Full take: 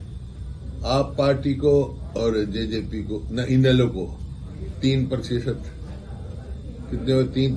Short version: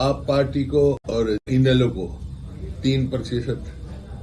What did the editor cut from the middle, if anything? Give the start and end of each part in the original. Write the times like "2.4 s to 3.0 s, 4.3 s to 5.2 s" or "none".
2.1 s to 3.1 s